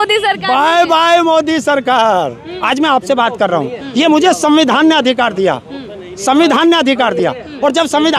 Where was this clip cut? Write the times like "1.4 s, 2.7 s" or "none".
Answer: 2.5 s